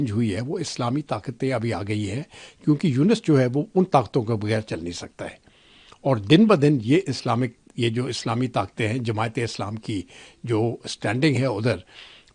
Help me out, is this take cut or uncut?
uncut